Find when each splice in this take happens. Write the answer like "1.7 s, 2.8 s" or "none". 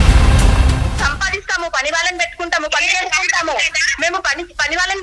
0.9 s